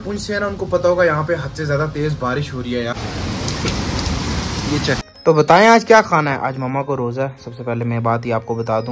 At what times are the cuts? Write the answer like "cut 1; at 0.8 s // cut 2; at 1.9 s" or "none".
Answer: cut 1; at 2.9 s // cut 2; at 5.0 s